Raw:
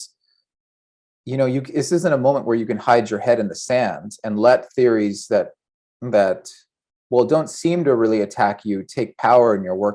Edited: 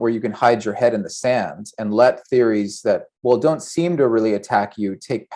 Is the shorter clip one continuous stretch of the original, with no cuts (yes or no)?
no